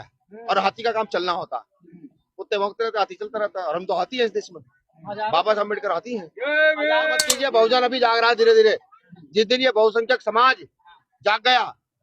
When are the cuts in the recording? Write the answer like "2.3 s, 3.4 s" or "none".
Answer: 7.3 s